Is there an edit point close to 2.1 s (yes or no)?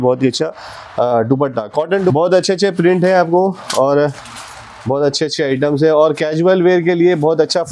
yes